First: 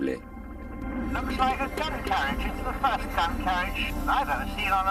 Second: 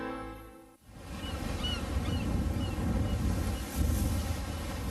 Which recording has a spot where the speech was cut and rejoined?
first; 1 cut; at 3.0 s

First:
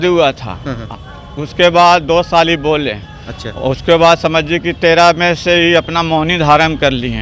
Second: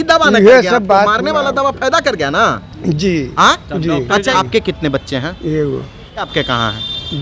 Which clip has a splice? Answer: second; 2 cuts; at 4.3 s, 6.3 s

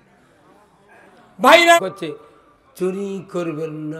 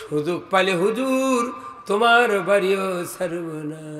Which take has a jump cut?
first; 1 cut; at 1.8 s

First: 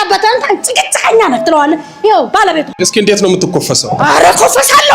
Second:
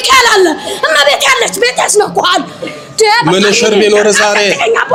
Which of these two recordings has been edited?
first; 1 cut; at 2.7 s

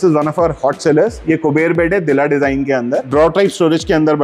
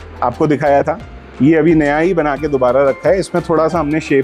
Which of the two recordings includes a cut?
first; 2 cuts; at 1.2 s, 3.1 s

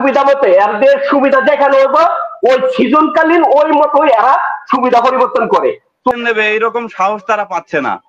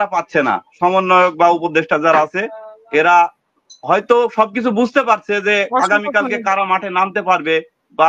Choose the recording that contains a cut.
first; 1 cut; at 5.9 s

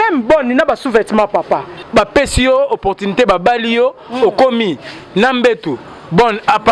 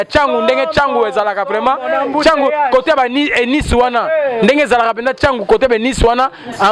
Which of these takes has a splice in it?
first; 1 cut; at 1.8 s

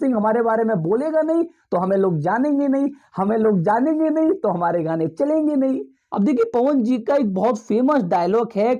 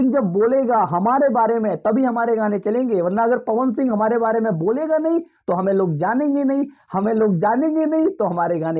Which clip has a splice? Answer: first; 1 cut; at 6.0 s

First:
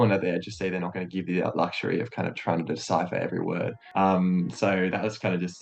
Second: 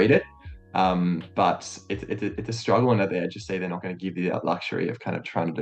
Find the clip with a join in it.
first; 1 cut; at 3.8 s

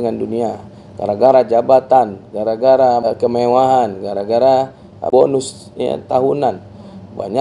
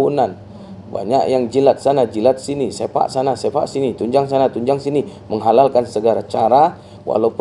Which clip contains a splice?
first; 2 cuts; at 3.0 s, 5.1 s

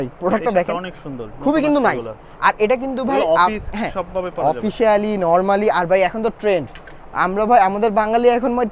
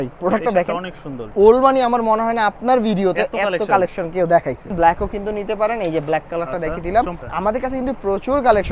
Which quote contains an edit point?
second; 3 cuts; at 1.2 s, 4.7 s, 7.2 s

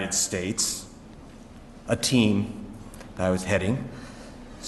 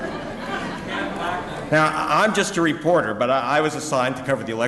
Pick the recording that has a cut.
second; 1 cut; at 3.8 s

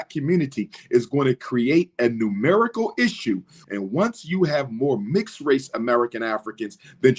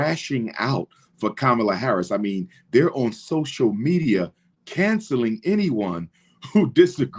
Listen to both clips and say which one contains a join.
first; 1 cut; at 3.6 s

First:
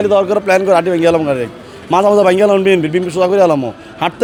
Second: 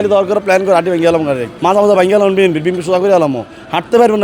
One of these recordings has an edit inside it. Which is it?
second; 1 cut; at 1.5 s

